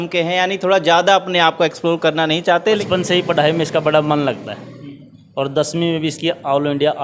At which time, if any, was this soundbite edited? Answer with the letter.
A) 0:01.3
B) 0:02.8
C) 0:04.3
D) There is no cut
B